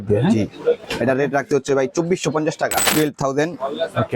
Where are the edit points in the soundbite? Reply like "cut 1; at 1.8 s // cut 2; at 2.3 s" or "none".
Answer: cut 1; at 0.9 s // cut 2; at 2.9 s